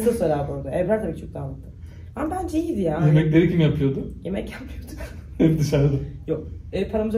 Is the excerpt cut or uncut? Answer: uncut